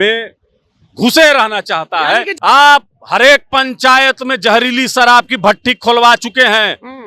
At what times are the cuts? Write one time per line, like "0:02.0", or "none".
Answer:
0:02.3